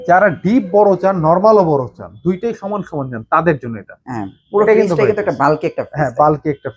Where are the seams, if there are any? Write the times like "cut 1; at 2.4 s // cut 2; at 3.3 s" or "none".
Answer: none